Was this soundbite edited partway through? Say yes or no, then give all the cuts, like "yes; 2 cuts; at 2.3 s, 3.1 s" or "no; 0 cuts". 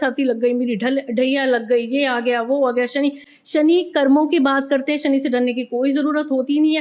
no; 0 cuts